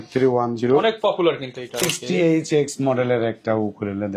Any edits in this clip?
yes; 1 cut; at 1.9 s

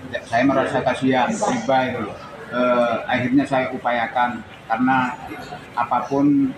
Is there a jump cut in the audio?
no; 0 cuts

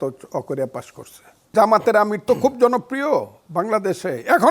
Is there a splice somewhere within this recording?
yes; 1 cut; at 1.5 s

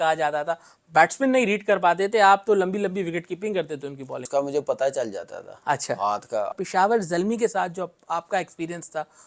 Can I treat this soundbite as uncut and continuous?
no; 2 cuts; at 4.2 s, 6.5 s

